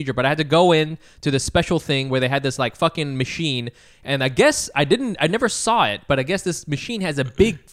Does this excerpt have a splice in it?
no; 0 cuts

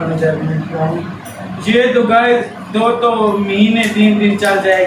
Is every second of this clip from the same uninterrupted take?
yes; 0 cuts

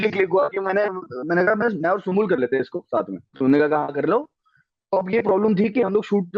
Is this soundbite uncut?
no; 1 cut; at 3.2 s

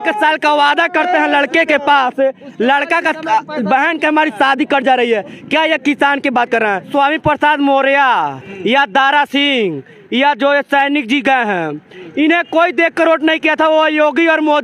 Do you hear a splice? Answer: yes; 1 cut; at 6.9 s

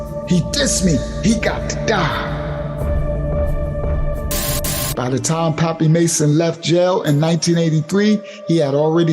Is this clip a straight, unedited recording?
no; 1 cut; at 4.8 s

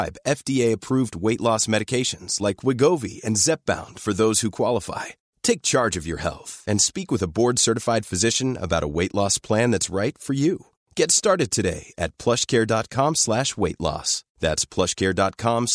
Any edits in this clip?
no; 0 cuts

